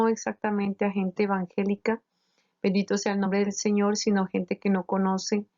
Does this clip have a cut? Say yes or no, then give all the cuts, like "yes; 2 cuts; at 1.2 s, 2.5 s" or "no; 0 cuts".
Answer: yes; 1 cut; at 4.6 s